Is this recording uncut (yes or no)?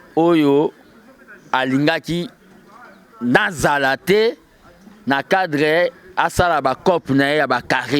yes